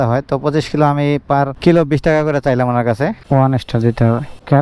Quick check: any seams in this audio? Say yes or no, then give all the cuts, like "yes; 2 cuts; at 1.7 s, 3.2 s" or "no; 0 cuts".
yes; 1 cut; at 3.3 s